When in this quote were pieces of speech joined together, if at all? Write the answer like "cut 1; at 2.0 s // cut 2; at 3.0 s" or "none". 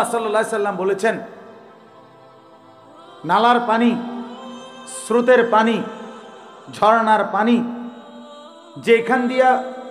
cut 1; at 1.8 s // cut 2; at 3.2 s